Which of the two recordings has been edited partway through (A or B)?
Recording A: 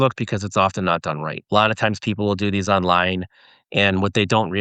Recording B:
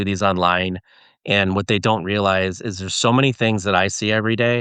A